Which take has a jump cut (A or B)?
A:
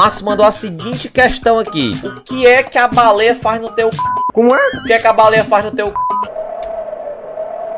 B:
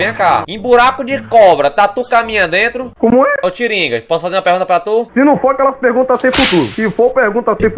B